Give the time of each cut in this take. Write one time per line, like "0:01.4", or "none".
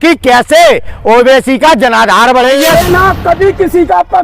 0:02.6